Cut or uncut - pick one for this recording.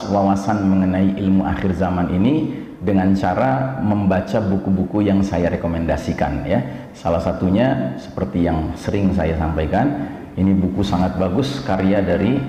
uncut